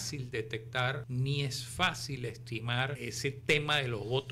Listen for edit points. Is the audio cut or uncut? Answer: cut